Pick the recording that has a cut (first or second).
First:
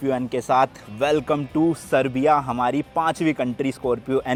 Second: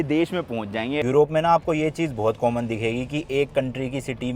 second